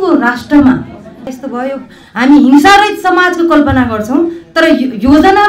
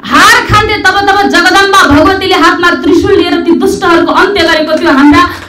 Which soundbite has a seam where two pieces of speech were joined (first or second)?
first